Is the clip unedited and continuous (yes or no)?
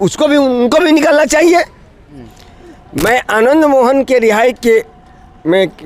no